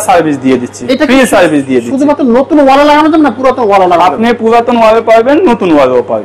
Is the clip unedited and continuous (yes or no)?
yes